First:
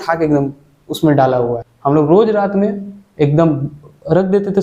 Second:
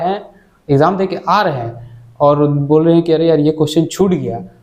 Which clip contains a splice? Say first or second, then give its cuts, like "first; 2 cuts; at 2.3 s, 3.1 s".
first; 1 cut; at 1.7 s